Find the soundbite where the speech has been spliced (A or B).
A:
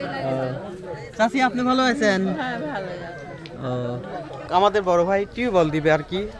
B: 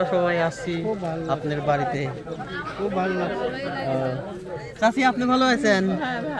A